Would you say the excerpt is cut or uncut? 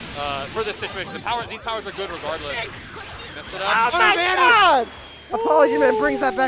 uncut